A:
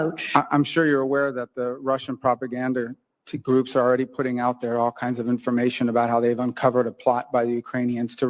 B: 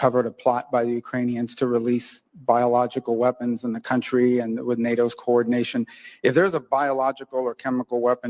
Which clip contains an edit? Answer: B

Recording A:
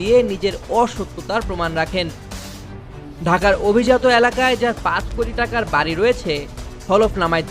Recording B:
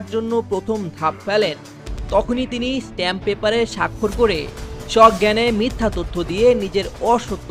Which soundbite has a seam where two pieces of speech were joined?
A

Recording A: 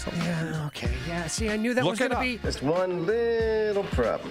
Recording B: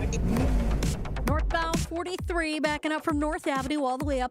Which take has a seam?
B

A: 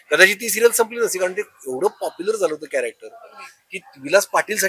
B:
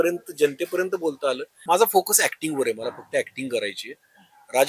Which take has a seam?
B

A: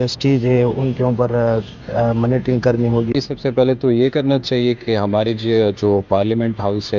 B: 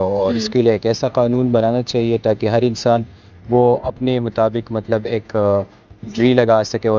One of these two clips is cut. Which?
A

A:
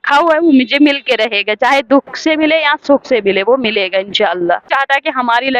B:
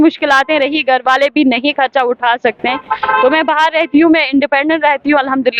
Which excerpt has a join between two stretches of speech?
A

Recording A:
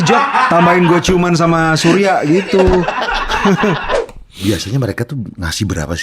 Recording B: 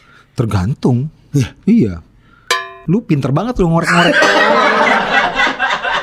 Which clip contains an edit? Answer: A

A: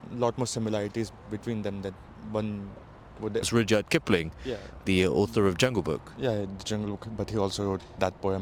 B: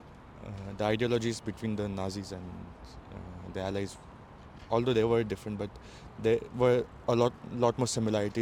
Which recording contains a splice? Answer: A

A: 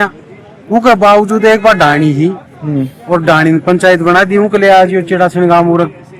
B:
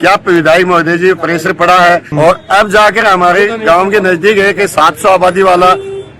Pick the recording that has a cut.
B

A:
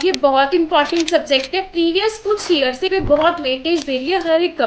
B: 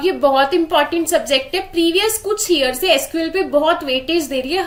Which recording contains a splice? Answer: A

